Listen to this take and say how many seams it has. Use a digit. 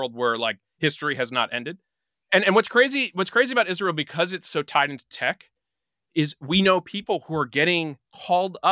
0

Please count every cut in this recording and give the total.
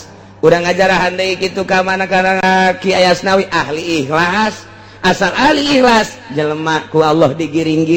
1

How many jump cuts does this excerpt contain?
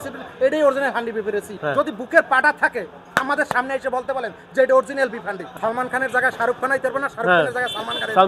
2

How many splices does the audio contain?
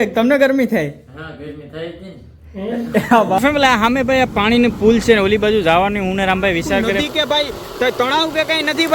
2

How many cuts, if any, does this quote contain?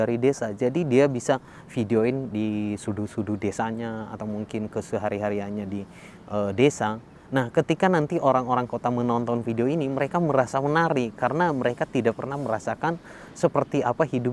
0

